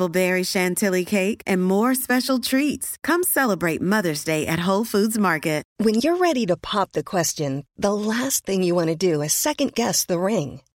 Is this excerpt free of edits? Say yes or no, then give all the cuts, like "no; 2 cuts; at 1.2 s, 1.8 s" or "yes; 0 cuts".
no; 1 cut; at 5.7 s